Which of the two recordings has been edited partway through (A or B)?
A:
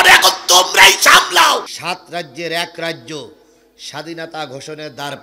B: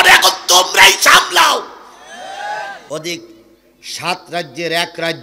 A